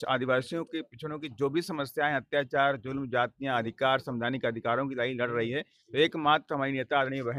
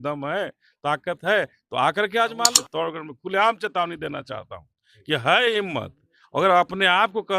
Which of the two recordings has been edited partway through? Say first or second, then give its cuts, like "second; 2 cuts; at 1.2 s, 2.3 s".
second; 1 cut; at 2.6 s